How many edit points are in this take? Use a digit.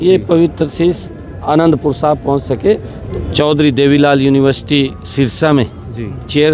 1